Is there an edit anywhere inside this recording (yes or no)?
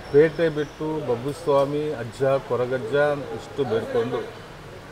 no